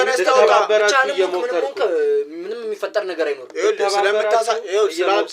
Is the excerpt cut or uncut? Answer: uncut